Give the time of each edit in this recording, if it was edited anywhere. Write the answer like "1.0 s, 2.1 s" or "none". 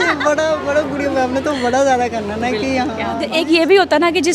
3.3 s